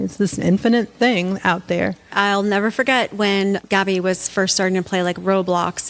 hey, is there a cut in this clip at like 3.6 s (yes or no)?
yes